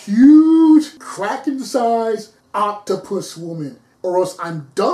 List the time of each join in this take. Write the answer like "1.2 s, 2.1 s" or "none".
1.0 s, 2.4 s, 3.9 s